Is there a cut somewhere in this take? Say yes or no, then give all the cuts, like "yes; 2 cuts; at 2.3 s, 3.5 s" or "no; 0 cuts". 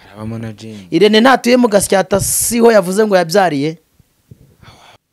no; 0 cuts